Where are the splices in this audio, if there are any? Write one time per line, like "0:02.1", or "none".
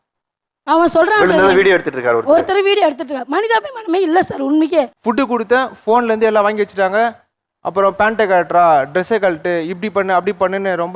0:05.0